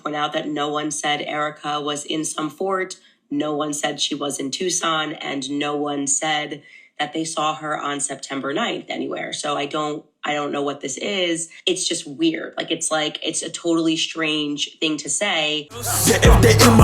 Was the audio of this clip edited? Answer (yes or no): yes